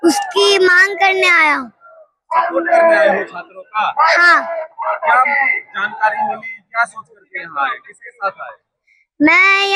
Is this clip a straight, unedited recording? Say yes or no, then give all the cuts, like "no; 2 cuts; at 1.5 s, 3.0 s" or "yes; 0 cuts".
yes; 0 cuts